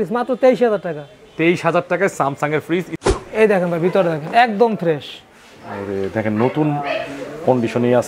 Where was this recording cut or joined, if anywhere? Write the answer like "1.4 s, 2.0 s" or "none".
3.0 s